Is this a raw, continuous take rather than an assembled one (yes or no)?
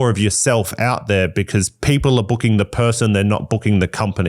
yes